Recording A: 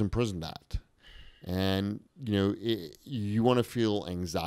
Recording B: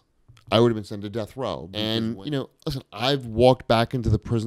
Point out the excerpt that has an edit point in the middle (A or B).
B